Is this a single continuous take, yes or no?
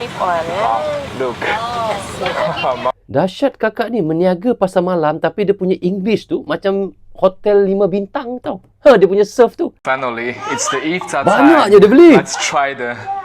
no